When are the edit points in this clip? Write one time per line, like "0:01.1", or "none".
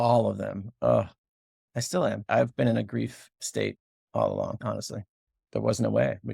0:05.3

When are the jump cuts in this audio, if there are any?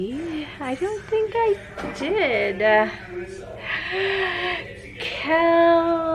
none

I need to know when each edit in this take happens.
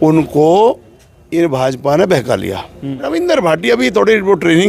0:03.0

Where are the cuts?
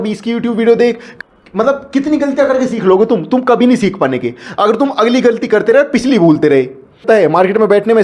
0:01.1
0:07.0

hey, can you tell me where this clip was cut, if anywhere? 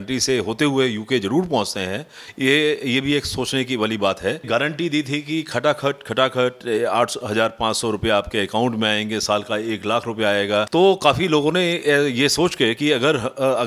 0:04.5
0:10.7

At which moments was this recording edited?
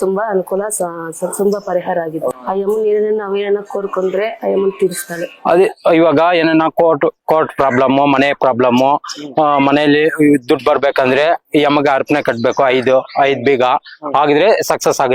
0:02.4
0:05.4

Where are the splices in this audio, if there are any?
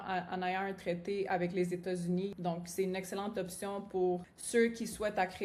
0:02.4
0:04.3

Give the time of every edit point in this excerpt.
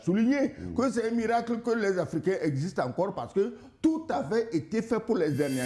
none

